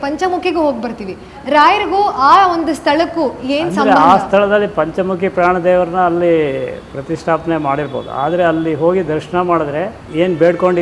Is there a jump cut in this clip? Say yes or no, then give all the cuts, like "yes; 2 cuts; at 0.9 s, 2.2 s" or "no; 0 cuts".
no; 0 cuts